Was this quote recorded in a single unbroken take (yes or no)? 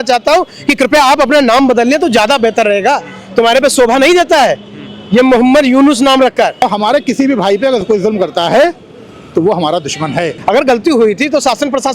no